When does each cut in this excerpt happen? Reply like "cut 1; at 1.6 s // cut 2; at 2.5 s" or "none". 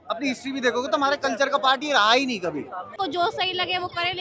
cut 1; at 2.8 s